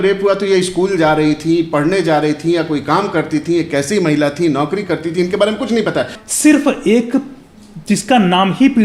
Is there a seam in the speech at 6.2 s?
yes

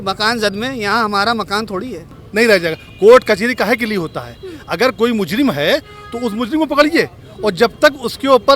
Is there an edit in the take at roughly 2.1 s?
no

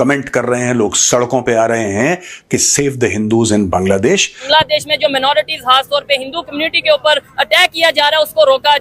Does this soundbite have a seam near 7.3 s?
no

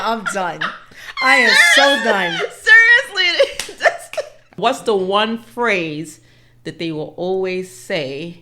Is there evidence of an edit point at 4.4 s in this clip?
yes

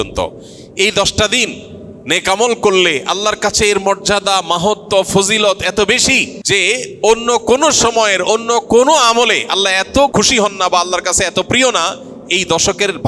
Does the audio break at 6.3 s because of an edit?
yes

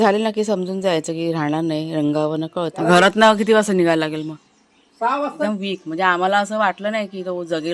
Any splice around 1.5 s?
no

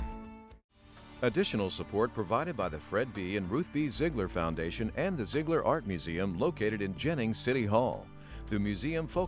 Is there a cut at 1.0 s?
yes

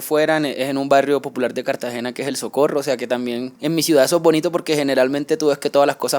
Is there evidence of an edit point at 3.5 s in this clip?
yes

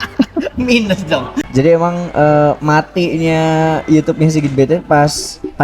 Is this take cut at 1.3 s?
yes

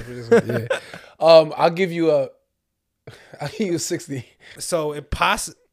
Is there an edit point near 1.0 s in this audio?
no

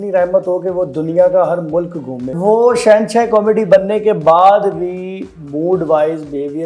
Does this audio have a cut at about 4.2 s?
no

